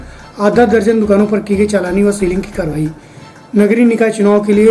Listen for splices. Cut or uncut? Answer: uncut